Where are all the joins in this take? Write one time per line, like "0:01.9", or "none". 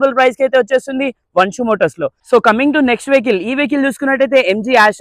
none

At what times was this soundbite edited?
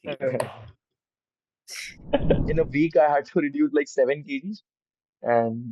0:02.5

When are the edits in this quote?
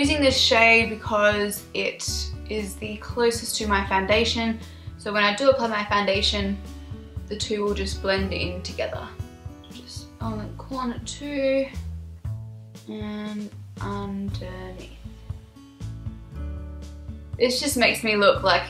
none

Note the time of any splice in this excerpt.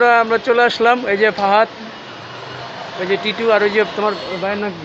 none

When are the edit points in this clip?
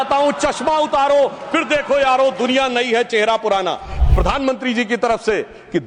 0:04.0

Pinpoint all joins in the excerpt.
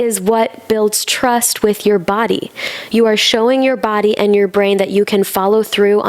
none

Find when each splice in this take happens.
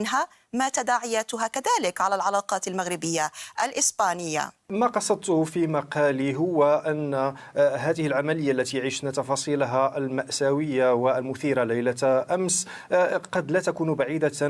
0:04.7

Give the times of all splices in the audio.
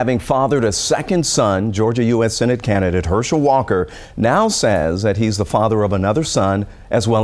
none

